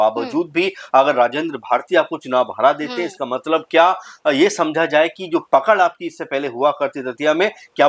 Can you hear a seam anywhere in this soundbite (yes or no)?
no